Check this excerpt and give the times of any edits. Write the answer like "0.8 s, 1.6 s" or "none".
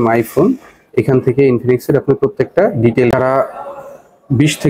3.1 s